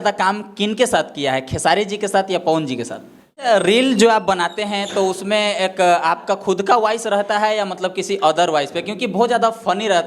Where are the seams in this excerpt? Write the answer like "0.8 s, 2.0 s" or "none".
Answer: 3.4 s